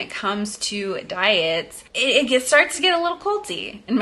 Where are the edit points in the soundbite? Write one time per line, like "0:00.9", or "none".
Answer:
none